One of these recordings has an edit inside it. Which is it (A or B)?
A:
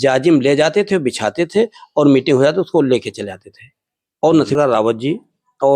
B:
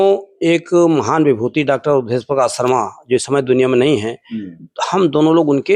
A